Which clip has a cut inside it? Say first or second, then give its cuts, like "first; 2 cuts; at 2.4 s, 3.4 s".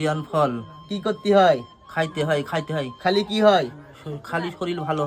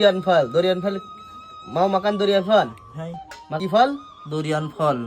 second; 1 cut; at 3.6 s